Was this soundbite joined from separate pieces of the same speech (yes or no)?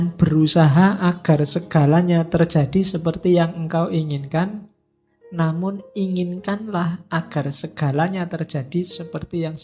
no